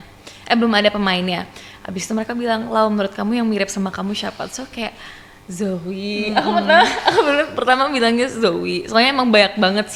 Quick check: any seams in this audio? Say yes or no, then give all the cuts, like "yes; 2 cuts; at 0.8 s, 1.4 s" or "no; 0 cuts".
no; 0 cuts